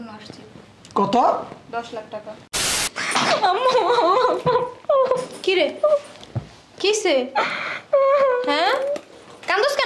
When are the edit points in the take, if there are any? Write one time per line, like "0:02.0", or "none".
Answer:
0:02.8